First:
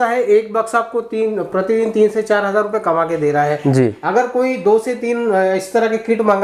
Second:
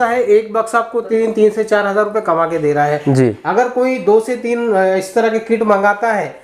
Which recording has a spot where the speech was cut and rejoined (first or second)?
second